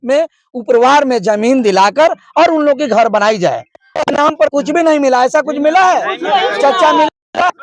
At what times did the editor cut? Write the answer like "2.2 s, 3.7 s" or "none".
3.8 s